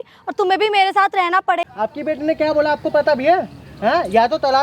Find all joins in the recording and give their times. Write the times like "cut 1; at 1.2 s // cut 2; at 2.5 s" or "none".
cut 1; at 1.7 s